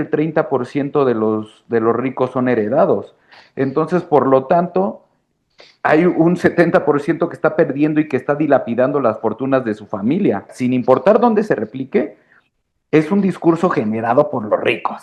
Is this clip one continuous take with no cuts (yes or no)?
no